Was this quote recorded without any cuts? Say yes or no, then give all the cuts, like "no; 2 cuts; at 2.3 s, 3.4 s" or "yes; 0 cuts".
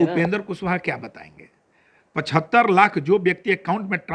yes; 0 cuts